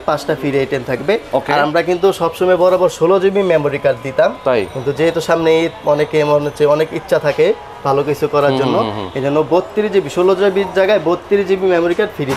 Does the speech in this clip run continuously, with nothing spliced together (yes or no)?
yes